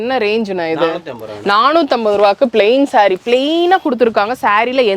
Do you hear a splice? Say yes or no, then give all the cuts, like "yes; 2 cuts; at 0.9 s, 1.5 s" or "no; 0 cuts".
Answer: no; 0 cuts